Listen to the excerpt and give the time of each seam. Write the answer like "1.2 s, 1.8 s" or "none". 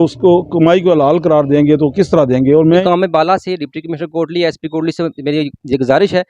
2.8 s